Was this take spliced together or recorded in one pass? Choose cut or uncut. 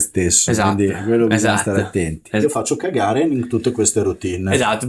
cut